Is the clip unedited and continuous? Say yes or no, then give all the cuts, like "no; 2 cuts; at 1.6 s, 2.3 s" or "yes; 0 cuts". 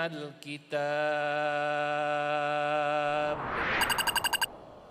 no; 1 cut; at 3.5 s